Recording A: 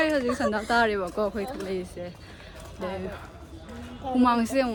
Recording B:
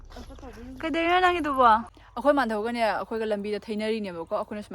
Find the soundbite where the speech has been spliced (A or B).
B